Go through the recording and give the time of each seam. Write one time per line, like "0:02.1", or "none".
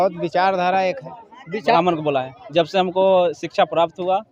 0:01.8